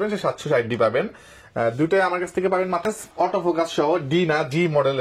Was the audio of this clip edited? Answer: yes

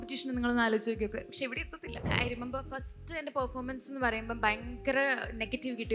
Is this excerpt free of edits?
no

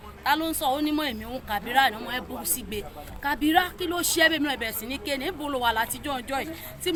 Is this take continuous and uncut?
yes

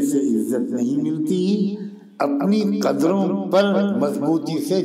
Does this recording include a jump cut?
no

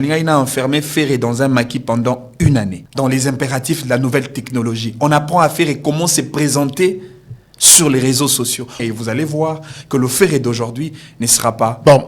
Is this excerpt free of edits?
no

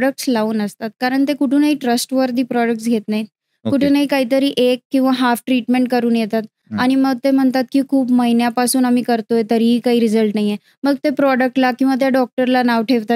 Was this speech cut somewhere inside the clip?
no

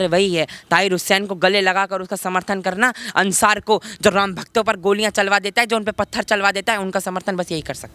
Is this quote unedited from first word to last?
yes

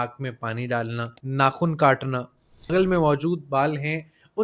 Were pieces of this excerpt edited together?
yes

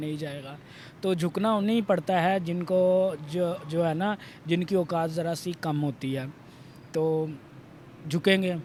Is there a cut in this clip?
no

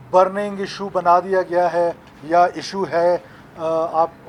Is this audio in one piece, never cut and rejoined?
yes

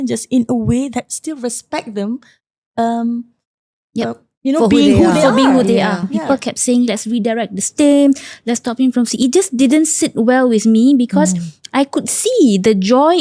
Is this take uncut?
no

